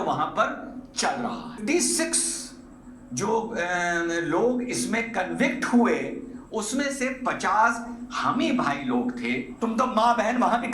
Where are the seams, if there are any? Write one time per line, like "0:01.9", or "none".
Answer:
0:01.5
0:09.5